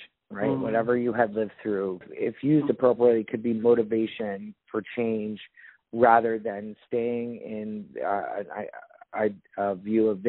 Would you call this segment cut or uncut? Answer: cut